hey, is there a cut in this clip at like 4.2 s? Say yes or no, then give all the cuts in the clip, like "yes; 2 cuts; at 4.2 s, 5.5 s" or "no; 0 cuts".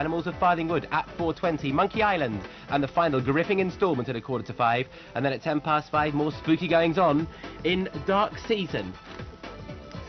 yes; 1 cut; at 4.2 s